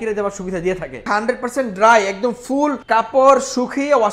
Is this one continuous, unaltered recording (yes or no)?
no